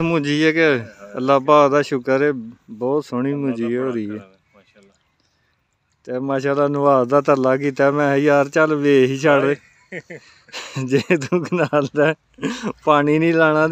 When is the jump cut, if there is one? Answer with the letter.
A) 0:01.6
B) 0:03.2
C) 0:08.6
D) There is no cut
D